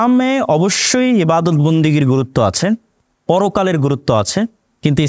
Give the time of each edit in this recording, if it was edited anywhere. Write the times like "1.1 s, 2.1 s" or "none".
none